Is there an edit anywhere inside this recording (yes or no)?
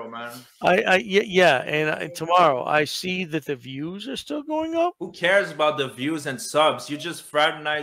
no